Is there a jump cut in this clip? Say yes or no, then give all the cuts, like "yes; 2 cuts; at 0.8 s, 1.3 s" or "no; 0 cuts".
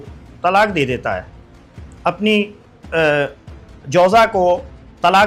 no; 0 cuts